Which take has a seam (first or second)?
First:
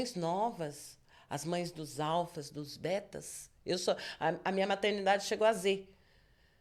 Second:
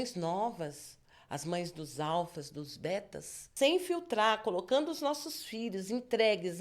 second